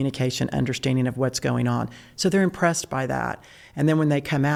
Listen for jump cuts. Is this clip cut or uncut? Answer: uncut